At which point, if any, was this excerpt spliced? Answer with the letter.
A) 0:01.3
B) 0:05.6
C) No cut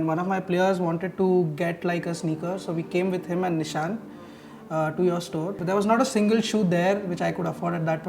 B